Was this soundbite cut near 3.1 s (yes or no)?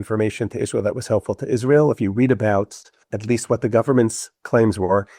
yes